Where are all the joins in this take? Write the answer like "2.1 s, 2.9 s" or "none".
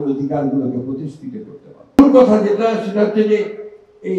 2.0 s